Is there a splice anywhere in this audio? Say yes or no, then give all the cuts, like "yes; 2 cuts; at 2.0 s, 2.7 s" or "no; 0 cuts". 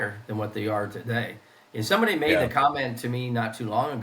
no; 0 cuts